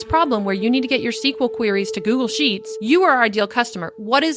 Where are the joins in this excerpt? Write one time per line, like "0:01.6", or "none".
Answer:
0:02.7